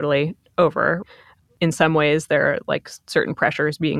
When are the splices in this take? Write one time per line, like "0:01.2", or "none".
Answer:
0:01.1